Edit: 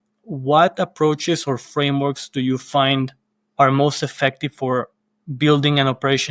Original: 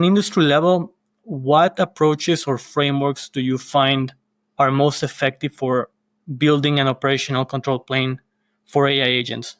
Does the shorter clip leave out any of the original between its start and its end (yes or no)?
no